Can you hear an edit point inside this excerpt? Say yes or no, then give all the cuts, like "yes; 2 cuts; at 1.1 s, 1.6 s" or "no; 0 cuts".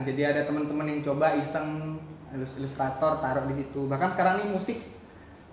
no; 0 cuts